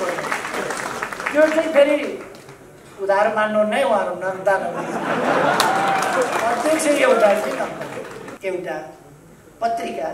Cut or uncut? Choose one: cut